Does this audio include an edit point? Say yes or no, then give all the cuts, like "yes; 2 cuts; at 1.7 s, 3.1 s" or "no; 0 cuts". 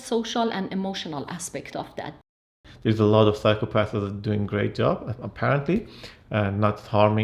yes; 1 cut; at 2.3 s